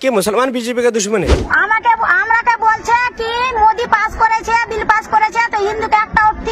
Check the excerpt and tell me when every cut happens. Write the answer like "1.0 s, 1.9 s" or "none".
1.5 s